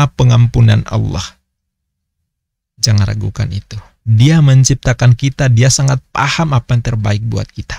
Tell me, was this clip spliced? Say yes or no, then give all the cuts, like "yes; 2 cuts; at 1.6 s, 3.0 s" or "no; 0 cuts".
no; 0 cuts